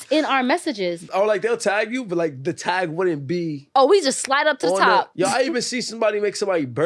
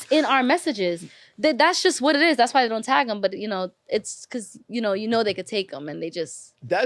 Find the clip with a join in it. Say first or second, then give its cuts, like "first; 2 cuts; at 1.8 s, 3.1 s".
first; 3 cuts; at 1.1 s, 3.7 s, 5.1 s